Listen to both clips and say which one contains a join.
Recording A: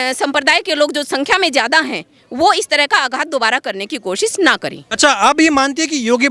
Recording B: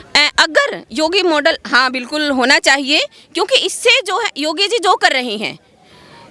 A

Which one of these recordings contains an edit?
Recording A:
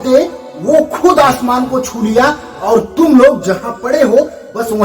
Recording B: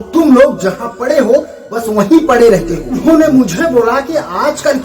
B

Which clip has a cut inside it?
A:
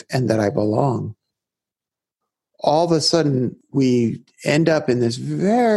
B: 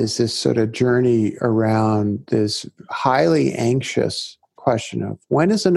A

